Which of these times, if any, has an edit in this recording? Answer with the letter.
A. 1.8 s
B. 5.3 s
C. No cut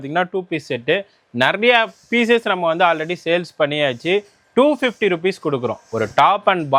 C